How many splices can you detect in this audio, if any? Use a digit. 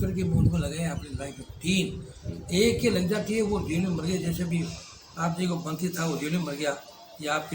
0